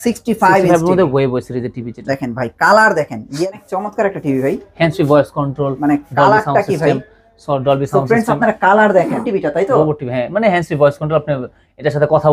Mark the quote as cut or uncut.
cut